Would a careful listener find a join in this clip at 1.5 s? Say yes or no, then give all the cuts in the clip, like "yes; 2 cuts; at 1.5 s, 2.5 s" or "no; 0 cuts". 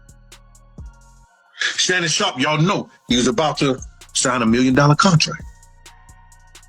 yes; 2 cuts; at 1.5 s, 5.4 s